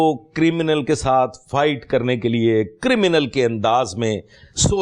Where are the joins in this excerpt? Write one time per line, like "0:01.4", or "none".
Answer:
none